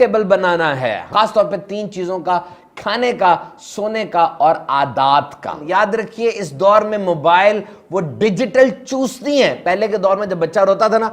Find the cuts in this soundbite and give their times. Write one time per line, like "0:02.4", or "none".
0:01.1
0:05.6